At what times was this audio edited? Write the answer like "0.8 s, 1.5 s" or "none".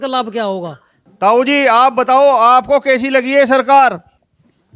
1.0 s